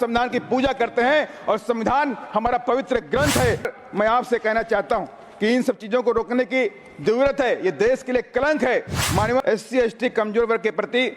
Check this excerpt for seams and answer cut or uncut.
cut